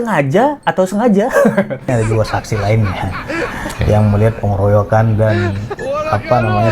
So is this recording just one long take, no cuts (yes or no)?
no